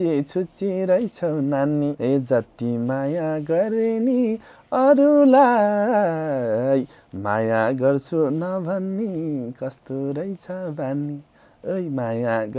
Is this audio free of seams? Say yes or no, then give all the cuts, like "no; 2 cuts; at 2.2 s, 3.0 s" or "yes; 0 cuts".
no; 1 cut; at 2.0 s